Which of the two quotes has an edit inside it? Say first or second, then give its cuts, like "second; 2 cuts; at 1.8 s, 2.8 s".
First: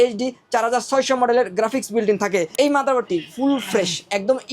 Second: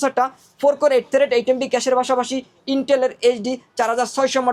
first; 1 cut; at 2.5 s